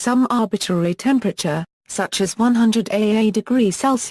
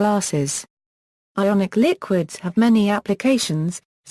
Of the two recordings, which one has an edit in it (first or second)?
second